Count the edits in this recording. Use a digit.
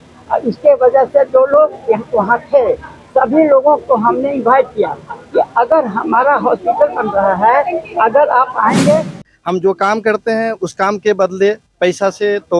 1